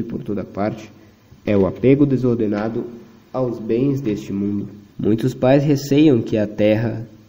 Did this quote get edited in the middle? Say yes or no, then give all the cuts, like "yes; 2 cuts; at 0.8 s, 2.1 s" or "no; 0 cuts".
yes; 1 cut; at 4.8 s